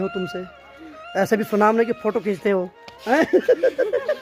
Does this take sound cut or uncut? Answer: uncut